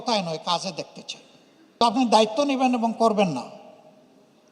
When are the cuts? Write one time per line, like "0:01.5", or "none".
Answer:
0:01.8